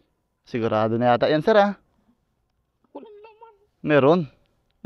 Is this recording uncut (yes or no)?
yes